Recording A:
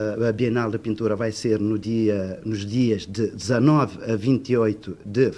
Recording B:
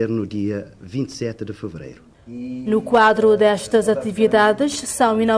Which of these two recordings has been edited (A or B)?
A